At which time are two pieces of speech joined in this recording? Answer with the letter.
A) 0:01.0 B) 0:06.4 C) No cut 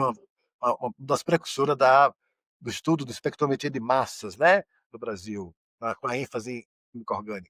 C